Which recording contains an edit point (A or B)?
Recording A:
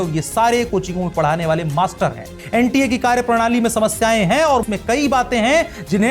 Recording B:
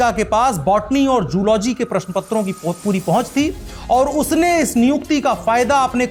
A